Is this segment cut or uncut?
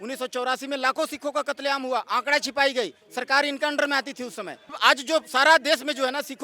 cut